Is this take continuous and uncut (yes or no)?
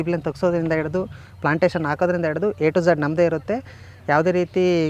yes